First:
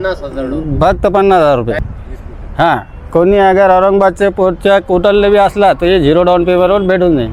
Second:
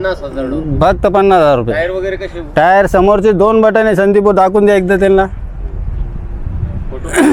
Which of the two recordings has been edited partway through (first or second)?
first